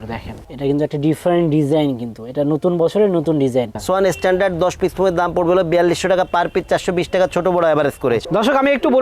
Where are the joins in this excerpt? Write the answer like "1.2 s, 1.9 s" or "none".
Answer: 3.7 s, 8.3 s